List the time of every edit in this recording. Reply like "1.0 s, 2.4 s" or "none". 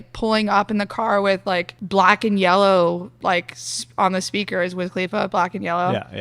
1.8 s, 3.1 s